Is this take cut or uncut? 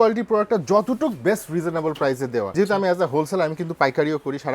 cut